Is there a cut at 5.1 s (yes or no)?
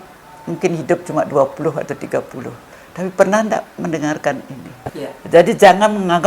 yes